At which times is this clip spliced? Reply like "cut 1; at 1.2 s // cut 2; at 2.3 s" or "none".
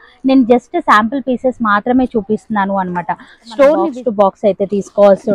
cut 1; at 3.9 s